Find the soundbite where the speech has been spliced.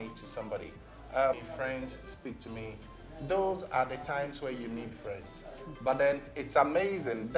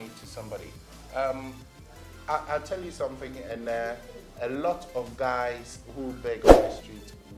first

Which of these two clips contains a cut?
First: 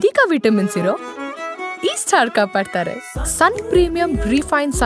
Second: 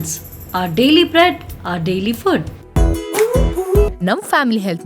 second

